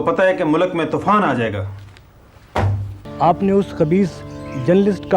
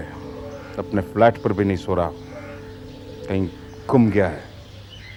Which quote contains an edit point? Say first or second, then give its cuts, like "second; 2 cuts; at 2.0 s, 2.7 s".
first; 1 cut; at 3.0 s